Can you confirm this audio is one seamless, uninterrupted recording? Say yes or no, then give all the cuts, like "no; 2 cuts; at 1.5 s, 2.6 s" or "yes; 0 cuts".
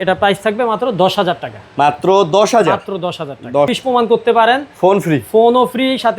no; 1 cut; at 3.7 s